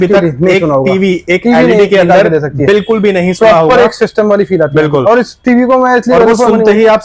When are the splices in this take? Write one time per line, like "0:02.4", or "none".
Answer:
none